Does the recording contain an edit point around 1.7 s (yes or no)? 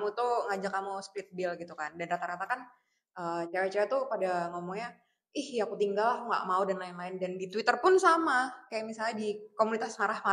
no